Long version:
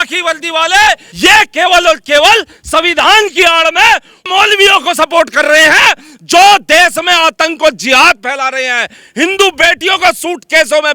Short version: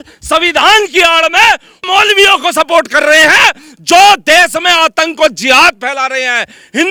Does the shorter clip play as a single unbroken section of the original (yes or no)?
yes